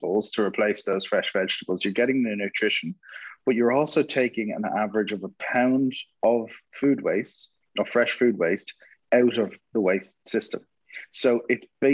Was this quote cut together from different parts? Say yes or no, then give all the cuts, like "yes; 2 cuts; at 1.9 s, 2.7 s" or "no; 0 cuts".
no; 0 cuts